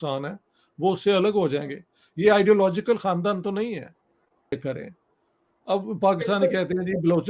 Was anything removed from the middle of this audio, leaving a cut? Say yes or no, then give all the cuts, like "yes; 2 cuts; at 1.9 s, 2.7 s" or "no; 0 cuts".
yes; 1 cut; at 4.5 s